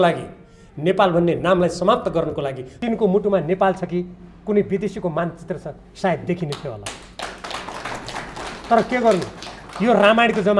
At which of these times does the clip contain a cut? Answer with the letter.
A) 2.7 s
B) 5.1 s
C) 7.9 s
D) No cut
A